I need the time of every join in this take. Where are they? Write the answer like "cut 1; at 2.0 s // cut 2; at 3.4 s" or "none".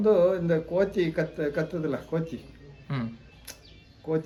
none